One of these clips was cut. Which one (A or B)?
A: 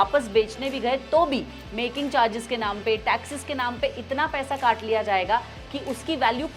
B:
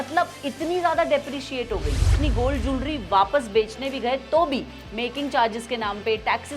B